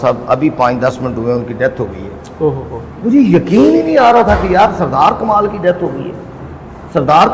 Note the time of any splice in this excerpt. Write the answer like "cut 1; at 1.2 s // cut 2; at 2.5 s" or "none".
none